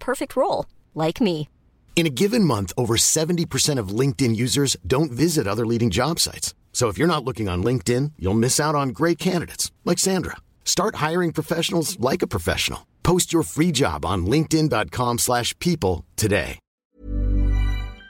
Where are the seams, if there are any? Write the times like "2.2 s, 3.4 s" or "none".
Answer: 16.9 s